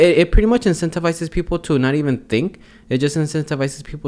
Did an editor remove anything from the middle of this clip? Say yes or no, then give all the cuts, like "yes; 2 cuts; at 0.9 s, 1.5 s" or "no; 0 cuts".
no; 0 cuts